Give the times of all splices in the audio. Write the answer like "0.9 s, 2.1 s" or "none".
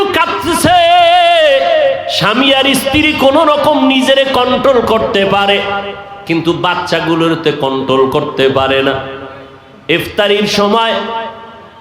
2.1 s